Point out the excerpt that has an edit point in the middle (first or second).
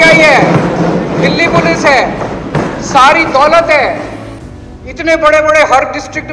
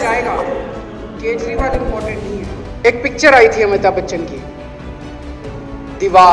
second